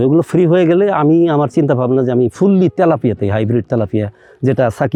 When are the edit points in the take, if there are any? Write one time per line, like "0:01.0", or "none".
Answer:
none